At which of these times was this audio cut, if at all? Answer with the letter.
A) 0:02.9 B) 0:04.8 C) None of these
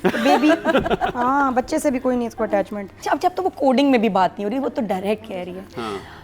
A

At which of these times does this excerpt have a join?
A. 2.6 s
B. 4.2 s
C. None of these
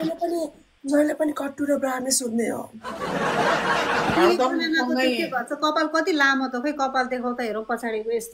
B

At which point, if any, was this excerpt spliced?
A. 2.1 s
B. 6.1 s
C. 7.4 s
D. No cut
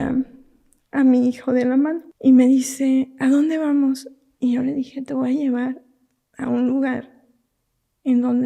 A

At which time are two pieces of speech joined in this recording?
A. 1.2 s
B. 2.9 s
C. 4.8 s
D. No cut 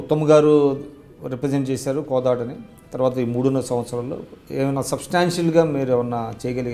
D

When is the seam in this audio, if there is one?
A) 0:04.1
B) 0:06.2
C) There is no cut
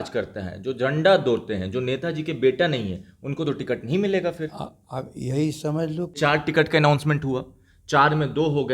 B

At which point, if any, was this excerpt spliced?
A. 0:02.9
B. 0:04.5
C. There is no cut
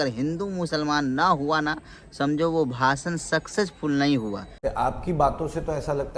B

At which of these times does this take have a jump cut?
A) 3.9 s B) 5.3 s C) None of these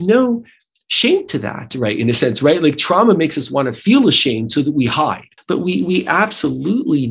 B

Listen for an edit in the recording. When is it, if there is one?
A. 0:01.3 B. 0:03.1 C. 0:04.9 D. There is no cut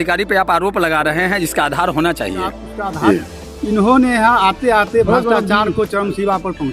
B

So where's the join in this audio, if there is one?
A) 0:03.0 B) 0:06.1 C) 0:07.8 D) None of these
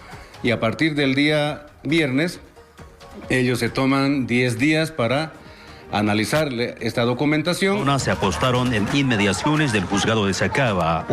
C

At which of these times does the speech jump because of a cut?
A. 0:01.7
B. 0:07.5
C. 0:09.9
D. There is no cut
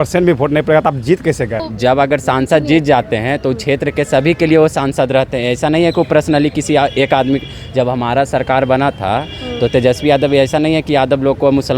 A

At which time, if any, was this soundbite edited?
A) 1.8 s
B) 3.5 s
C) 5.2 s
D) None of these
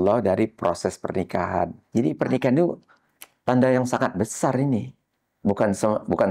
A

